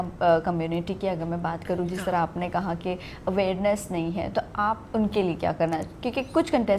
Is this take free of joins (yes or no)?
yes